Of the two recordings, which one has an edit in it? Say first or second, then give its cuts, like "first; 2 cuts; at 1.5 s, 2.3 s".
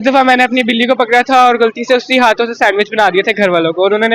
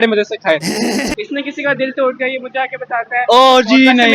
second; 1 cut; at 1.1 s